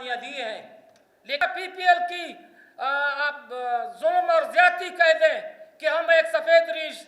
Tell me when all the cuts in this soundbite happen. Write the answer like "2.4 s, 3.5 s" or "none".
1.4 s